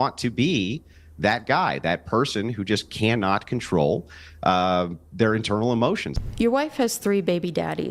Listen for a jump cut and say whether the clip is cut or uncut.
cut